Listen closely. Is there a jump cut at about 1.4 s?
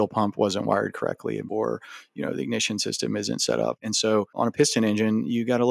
yes; 2 cuts; at 1.4 s, 4.0 s

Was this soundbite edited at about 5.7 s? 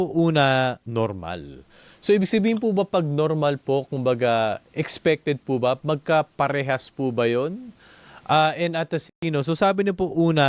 no; 1 cut; at 9.2 s

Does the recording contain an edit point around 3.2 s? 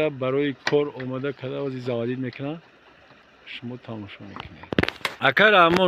no; 1 cut; at 4.9 s

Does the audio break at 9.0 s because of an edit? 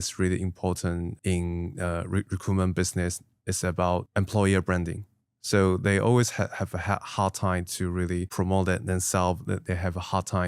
no; 2 cuts; at 1.1 s, 4.1 s

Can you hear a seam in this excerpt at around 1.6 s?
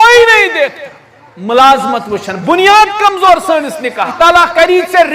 no; 1 cut; at 4.1 s

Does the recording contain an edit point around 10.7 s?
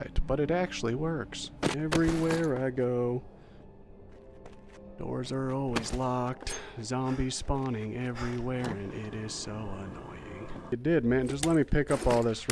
yes; 2 cuts; at 1.7 s, 10.7 s

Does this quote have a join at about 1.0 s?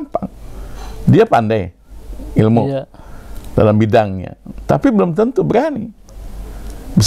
no; 0 cuts

